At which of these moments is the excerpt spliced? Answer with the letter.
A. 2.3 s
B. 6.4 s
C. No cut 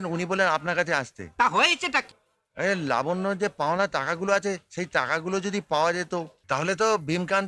B